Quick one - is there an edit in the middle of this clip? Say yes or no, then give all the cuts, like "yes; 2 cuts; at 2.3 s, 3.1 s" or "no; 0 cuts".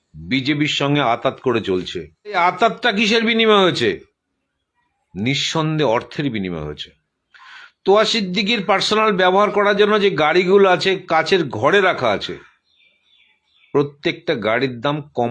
yes; 1 cut; at 2.4 s